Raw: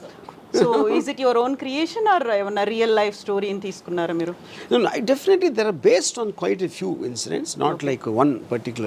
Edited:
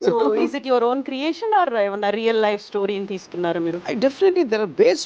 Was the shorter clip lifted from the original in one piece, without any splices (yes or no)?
no